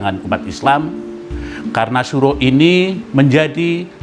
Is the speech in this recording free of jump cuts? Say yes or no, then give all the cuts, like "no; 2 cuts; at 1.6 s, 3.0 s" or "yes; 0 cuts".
no; 1 cut; at 3.0 s